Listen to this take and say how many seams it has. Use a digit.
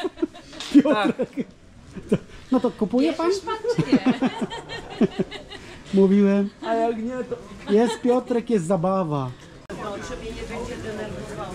1